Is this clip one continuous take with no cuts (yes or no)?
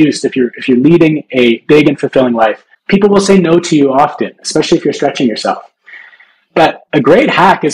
no